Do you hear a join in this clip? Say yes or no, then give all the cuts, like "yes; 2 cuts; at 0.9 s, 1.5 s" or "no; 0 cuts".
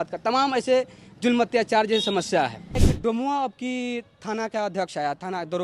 yes; 1 cut; at 2.9 s